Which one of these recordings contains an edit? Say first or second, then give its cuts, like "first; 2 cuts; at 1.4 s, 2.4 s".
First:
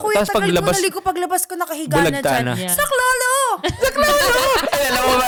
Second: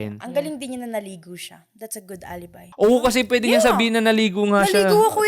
second; 1 cut; at 2.6 s